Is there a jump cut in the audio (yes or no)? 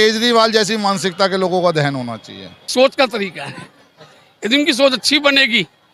yes